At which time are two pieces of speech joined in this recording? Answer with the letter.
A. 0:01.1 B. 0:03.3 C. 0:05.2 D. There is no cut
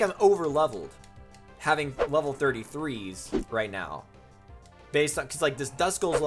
B